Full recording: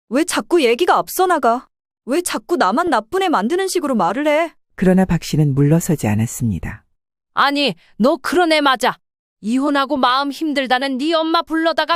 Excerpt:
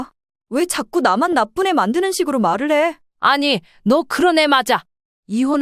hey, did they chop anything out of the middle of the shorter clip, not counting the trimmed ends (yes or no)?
yes